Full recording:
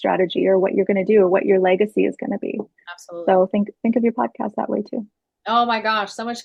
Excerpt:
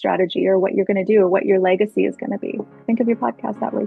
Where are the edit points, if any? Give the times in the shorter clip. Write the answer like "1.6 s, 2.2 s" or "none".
2.8 s